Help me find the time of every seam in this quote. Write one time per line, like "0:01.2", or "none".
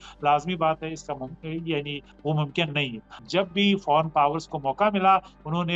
0:03.0